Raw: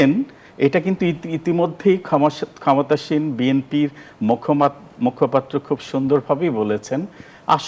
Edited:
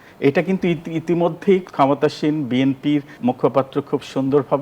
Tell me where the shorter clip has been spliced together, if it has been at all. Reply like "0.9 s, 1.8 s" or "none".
1.7 s, 3.1 s